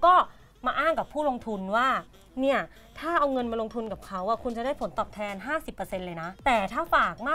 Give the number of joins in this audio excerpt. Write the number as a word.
one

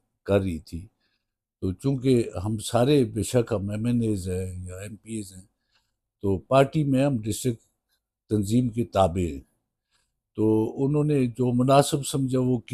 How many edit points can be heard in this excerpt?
zero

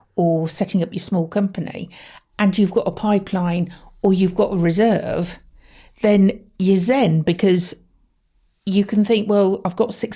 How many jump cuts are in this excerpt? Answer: zero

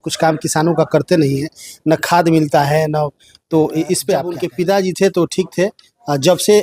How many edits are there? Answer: one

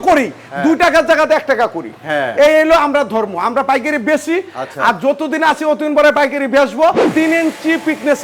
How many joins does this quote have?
one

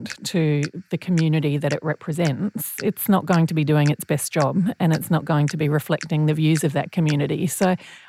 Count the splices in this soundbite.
zero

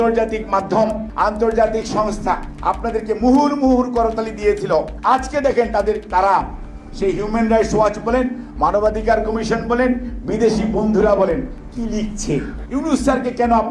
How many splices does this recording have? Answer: four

